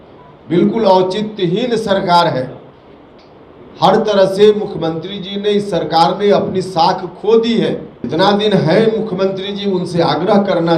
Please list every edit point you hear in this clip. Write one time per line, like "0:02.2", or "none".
0:07.9

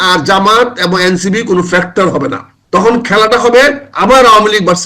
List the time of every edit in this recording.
0:02.8

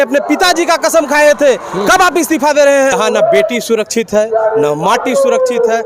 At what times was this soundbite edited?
0:02.9

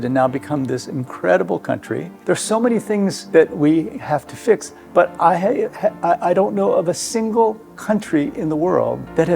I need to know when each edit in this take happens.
0:02.1

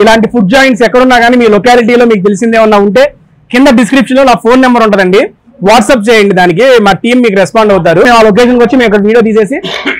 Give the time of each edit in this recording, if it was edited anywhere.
0:08.1

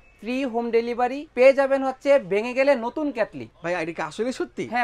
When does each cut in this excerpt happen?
0:01.2
0:03.5

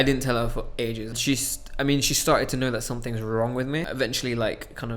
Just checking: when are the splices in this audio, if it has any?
0:01.2
0:03.9

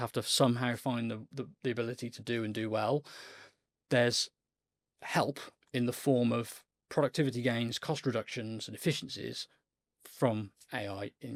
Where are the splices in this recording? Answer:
none

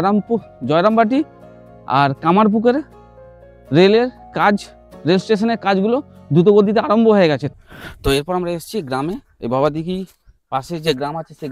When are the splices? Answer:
0:07.5

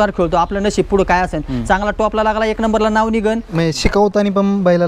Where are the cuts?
0:03.5

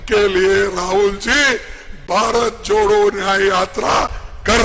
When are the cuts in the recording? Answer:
none

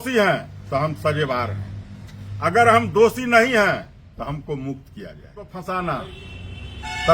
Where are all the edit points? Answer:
0:05.6

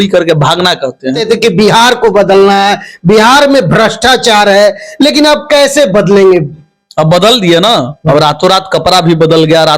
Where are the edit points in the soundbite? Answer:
0:01.2

